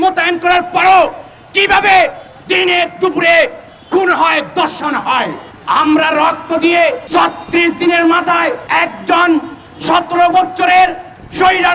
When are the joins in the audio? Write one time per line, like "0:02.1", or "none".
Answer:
0:05.5
0:07.0
0:08.6